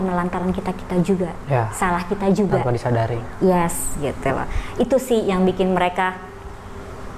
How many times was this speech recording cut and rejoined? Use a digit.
0